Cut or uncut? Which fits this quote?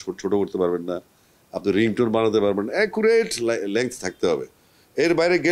uncut